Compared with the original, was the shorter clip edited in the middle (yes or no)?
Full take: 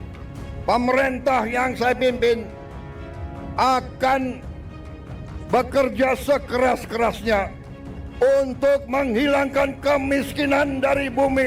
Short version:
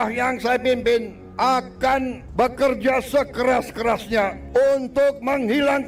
yes